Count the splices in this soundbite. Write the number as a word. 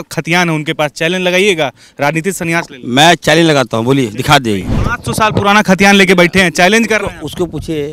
one